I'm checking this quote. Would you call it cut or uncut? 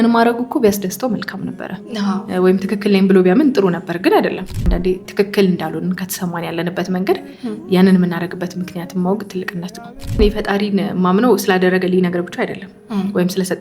cut